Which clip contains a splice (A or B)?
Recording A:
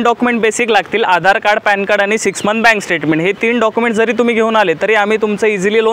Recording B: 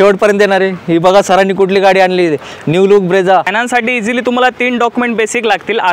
B